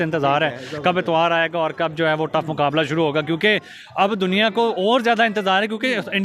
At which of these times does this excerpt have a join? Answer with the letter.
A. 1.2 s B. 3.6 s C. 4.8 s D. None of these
D